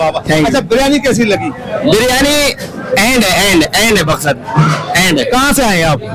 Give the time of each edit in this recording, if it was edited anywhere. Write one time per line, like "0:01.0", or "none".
none